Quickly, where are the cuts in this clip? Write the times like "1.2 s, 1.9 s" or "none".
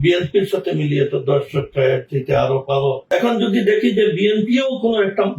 3.0 s